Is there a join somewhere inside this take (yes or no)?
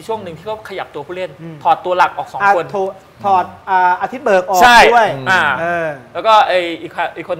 no